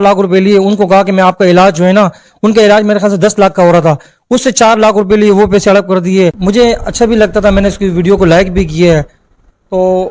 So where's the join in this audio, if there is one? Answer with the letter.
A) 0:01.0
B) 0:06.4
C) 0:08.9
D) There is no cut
B